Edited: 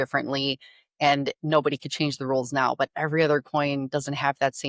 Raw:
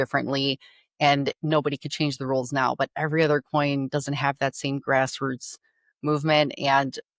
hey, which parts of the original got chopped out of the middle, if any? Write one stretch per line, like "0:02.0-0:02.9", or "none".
none